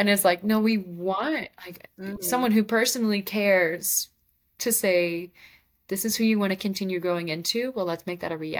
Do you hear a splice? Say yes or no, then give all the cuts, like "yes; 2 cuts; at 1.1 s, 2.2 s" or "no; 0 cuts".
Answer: no; 0 cuts